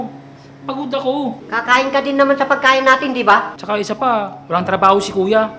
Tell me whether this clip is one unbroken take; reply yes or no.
no